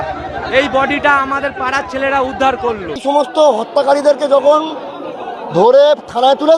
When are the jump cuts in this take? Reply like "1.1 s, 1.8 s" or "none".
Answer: 3.0 s